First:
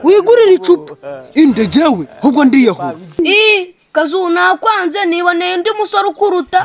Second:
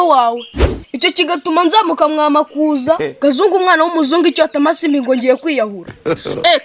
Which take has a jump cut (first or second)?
first